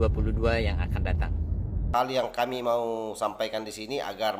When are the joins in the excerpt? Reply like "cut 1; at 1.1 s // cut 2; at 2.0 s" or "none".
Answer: cut 1; at 1.8 s